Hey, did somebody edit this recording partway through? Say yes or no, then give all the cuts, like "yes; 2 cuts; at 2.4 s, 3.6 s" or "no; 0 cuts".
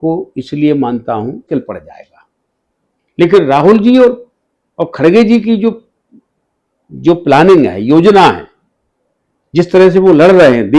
yes; 1 cut; at 1.5 s